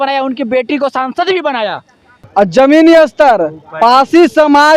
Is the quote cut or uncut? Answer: cut